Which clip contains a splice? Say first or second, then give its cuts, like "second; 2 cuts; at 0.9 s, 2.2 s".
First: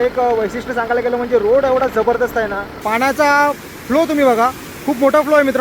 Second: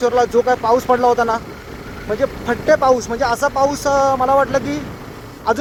first; 1 cut; at 2.8 s